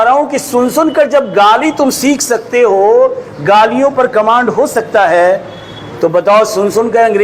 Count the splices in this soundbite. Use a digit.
0